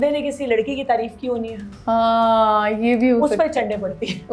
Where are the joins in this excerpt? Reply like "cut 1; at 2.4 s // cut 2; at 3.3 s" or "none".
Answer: none

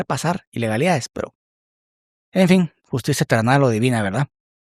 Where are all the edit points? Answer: none

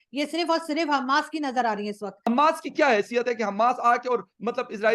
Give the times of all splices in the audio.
cut 1; at 2.2 s

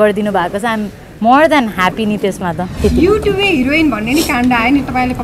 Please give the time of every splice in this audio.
cut 1; at 2.7 s

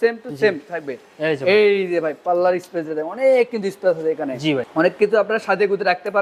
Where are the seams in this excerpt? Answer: none

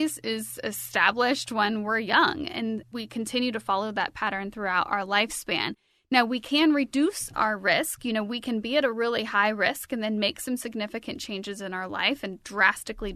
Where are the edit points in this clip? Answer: none

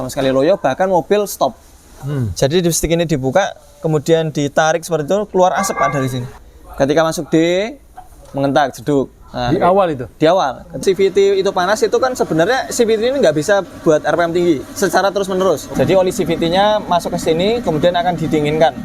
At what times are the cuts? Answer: cut 1; at 1.9 s // cut 2; at 6.3 s // cut 3; at 10.8 s // cut 4; at 15.7 s

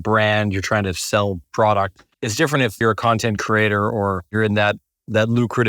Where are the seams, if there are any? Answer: cut 1; at 2.6 s // cut 2; at 4.3 s

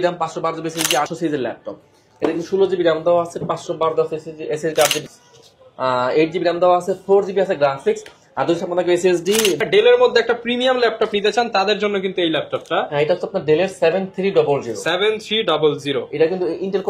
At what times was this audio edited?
cut 1; at 1.1 s // cut 2; at 5.0 s // cut 3; at 9.6 s

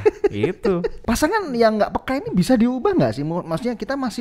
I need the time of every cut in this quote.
cut 1; at 1.0 s

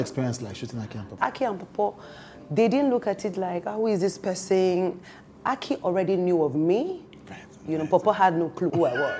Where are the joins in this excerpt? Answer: cut 1; at 1.2 s

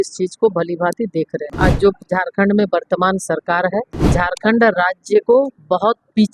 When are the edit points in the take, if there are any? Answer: cut 1; at 1.4 s // cut 2; at 4.0 s

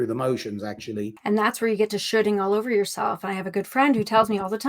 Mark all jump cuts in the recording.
cut 1; at 1.2 s

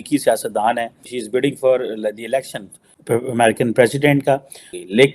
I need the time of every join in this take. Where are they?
cut 1; at 1.1 s

